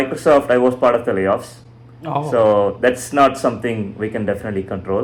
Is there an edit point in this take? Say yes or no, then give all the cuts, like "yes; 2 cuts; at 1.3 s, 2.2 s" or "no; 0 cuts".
no; 0 cuts